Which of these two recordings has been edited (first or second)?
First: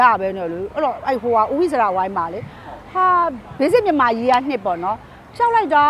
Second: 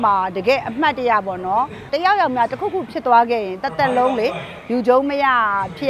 second